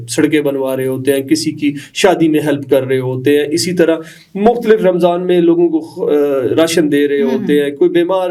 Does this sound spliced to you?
no; 0 cuts

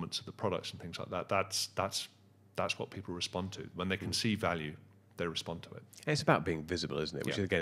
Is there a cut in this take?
no; 0 cuts

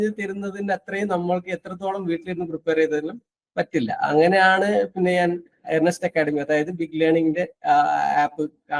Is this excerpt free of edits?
yes; 0 cuts

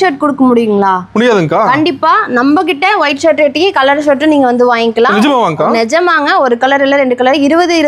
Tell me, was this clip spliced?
no; 0 cuts

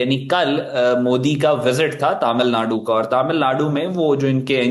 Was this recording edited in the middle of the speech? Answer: no; 0 cuts

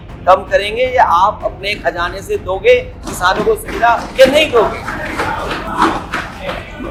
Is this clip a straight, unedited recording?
yes; 0 cuts

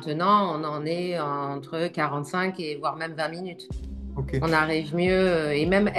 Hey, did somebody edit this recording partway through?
no; 0 cuts

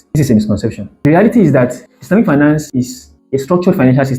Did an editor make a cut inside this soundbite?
no; 0 cuts

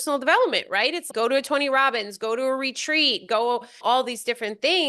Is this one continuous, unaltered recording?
no; 2 cuts; at 1.1 s, 3.8 s

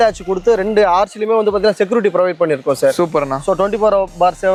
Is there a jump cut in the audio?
no; 0 cuts

